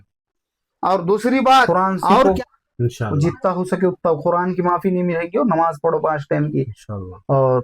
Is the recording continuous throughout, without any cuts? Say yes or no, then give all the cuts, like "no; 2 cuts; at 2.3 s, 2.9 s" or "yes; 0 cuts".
no; 1 cut; at 2.2 s